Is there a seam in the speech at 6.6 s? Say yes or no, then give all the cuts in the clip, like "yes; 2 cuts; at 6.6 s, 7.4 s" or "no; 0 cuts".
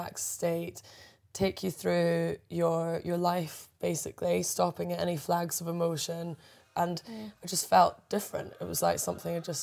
yes; 1 cut; at 6.6 s